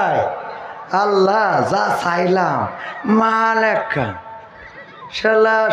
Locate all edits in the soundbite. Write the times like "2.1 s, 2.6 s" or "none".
none